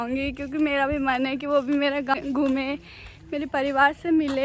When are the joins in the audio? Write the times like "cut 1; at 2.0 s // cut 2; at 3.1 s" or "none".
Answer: cut 1; at 2.1 s